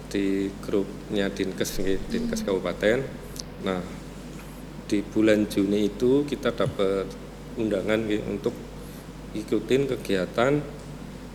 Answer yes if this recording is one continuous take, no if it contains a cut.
yes